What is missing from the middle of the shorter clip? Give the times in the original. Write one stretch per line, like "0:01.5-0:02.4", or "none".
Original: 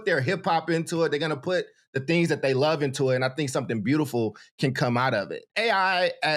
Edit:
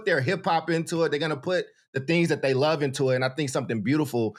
none

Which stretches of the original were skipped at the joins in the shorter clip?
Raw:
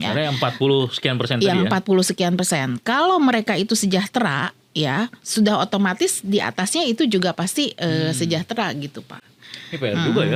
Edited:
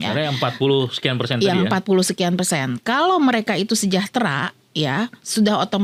none

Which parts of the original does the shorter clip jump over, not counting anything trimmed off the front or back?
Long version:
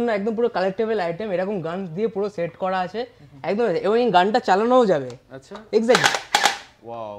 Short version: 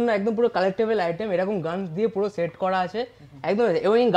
none

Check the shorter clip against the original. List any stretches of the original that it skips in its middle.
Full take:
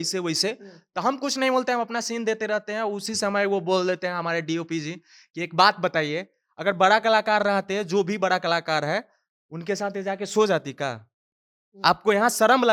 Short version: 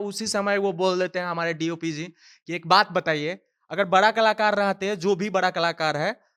none

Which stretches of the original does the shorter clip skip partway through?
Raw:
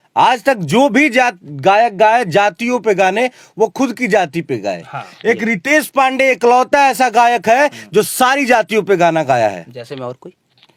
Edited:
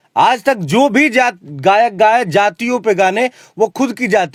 none

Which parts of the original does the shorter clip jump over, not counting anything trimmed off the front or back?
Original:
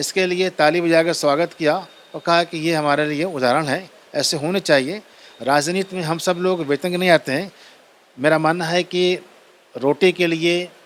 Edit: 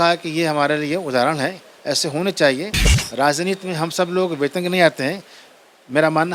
none

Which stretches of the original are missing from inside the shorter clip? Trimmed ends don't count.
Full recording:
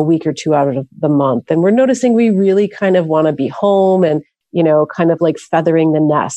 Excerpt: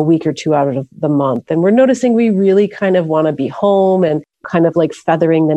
0:04.5-0:04.9

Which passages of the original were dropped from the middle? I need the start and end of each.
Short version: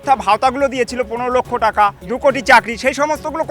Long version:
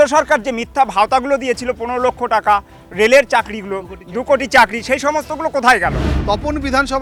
0:02.7-0:04.1

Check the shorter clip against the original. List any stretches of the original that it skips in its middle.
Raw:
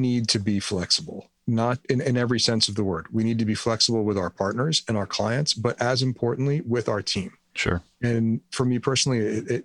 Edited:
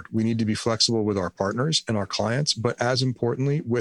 none

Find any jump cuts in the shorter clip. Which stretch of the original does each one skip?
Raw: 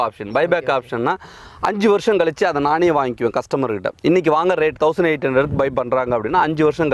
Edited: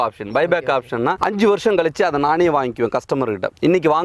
0:01.2-0:01.6

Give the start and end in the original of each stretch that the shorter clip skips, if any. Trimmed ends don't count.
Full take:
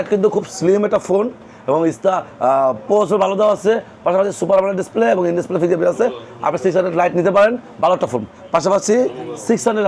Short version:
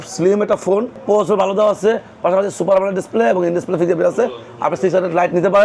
0:01.4-0:02.8

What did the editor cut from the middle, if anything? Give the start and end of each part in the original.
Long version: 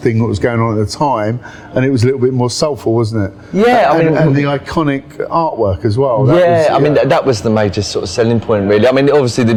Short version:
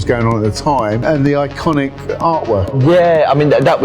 0:01.5-0:04.2
0:05.8-0:06.2

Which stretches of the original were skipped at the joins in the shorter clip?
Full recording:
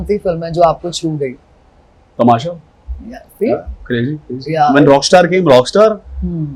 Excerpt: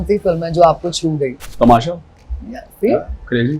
0:01.4-0:02.0

